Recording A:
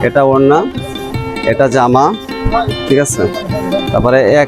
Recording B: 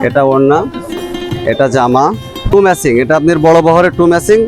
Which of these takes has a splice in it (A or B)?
B